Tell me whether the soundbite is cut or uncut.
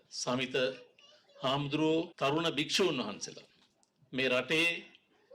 cut